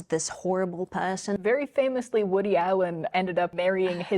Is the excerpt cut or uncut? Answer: cut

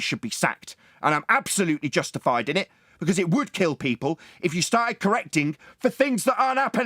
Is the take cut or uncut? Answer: uncut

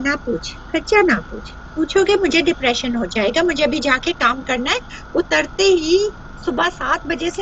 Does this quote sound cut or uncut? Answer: uncut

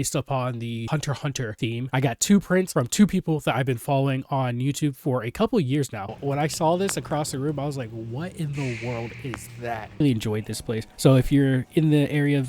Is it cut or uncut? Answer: cut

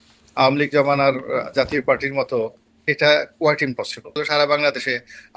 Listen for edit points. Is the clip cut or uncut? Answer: cut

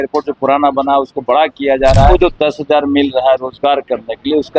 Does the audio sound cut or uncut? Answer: cut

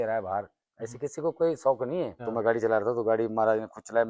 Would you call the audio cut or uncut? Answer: cut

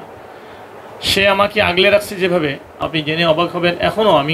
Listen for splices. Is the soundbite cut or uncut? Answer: cut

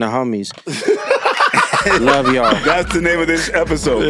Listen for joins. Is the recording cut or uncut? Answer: uncut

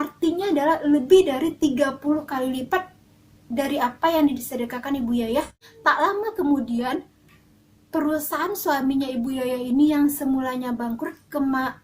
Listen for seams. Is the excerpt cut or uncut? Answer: cut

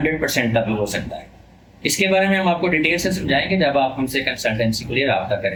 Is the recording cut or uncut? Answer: uncut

